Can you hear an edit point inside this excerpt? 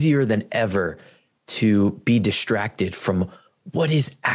no; 0 cuts

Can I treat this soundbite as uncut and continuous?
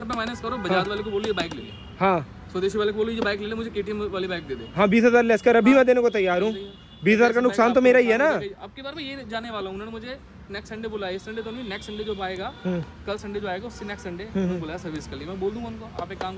yes; 0 cuts

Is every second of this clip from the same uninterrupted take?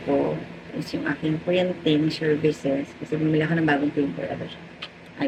yes; 0 cuts

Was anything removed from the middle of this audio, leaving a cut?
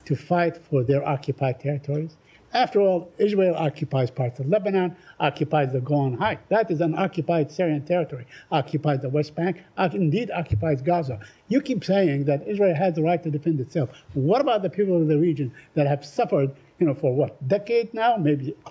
no; 0 cuts

